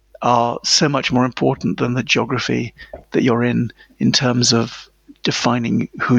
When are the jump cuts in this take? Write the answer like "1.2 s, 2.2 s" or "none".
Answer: none